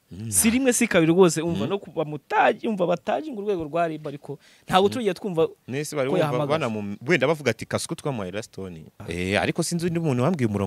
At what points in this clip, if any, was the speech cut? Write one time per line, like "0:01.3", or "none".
0:09.0

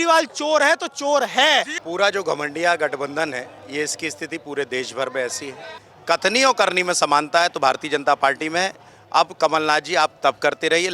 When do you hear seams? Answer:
0:01.8
0:05.9

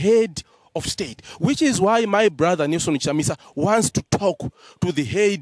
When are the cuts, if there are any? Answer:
none

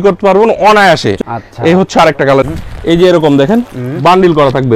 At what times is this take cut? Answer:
0:01.2
0:02.4

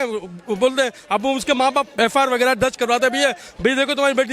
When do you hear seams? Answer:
0:01.9

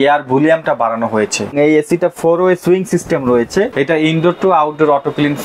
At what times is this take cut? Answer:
0:01.5
0:03.7

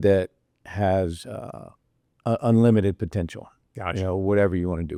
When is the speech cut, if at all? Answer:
none

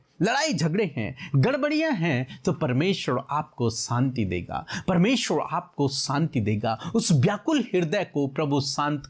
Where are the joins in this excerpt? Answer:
none

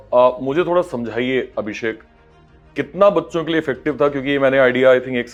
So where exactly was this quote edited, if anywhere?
none

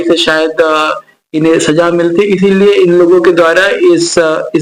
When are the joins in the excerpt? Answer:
none

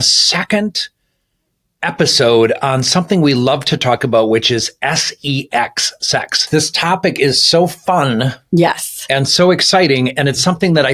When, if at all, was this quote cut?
0:06.4

